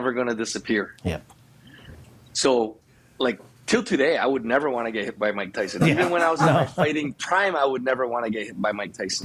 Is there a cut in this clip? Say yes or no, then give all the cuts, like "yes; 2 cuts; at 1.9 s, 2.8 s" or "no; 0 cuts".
no; 0 cuts